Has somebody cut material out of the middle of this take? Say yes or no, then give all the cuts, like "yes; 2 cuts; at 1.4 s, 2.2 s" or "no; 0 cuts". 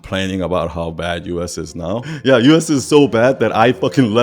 yes; 1 cut; at 2.1 s